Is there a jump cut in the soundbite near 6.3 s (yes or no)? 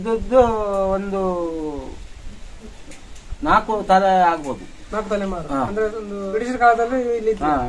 yes